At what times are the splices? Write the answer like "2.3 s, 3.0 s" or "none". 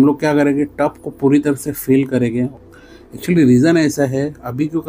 2.5 s